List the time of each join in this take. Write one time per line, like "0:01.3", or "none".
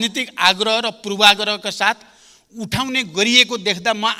none